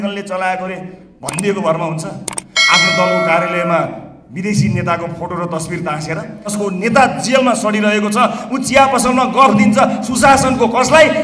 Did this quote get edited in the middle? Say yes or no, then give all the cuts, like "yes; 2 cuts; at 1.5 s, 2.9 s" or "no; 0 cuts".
yes; 1 cut; at 6.5 s